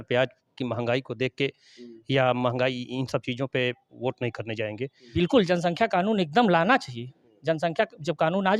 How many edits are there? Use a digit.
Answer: 1